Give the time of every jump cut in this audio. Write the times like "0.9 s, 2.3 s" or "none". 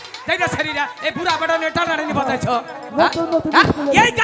none

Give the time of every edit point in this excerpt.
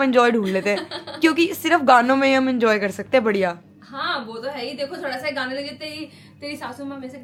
none

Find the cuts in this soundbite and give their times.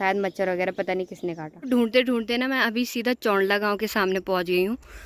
1.6 s

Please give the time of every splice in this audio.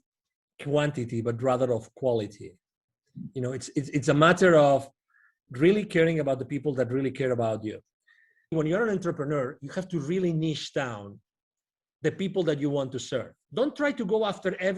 8.5 s, 13.4 s

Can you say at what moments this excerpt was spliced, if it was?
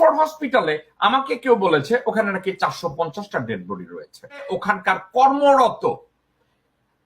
4.4 s

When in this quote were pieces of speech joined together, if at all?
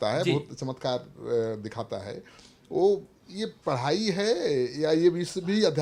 none

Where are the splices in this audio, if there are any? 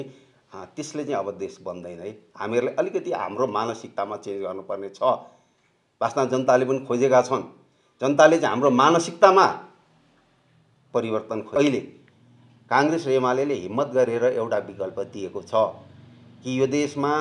11.6 s

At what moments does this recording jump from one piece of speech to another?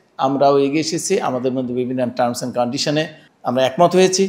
3.2 s

